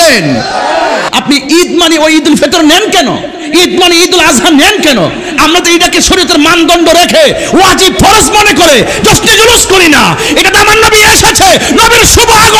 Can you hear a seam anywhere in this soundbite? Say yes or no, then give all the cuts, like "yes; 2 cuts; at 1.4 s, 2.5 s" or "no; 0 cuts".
yes; 1 cut; at 1.1 s